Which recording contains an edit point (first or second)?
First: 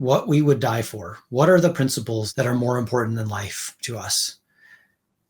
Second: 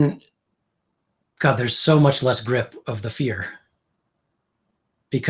first